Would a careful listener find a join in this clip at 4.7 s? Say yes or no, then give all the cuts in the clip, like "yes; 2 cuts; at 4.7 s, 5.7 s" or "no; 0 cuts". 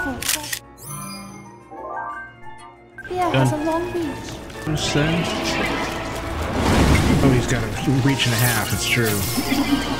yes; 1 cut; at 4.7 s